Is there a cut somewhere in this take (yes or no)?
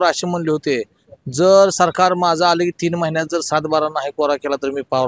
no